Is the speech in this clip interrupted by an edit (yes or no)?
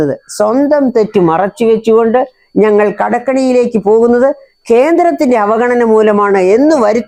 no